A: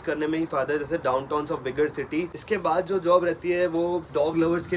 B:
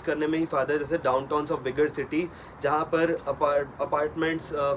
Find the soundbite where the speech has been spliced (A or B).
A